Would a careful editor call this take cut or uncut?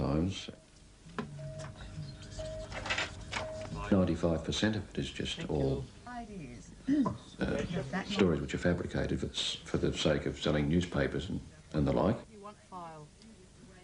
cut